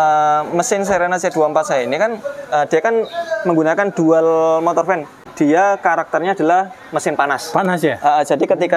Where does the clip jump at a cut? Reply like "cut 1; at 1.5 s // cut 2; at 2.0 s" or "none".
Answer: cut 1; at 5.2 s